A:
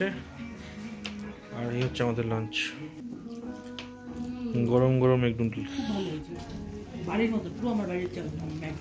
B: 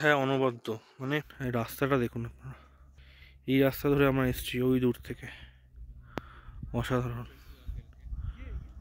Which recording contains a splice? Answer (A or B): B